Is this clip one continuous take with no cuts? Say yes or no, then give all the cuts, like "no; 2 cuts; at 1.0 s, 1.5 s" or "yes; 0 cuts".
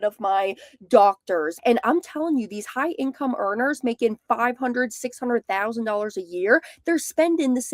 no; 1 cut; at 1.5 s